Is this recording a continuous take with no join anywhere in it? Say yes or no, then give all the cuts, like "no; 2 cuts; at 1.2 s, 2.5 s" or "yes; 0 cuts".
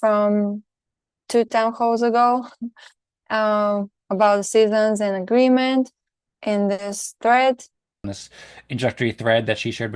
no; 1 cut; at 8.2 s